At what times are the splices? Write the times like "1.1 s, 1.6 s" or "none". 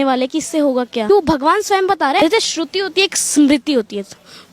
1.1 s, 2.2 s